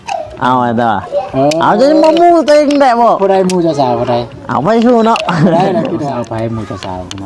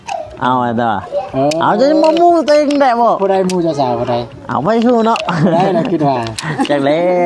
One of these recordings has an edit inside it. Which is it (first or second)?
first